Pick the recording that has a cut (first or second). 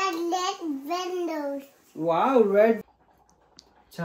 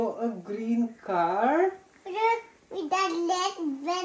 first